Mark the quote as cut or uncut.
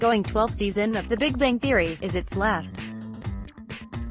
cut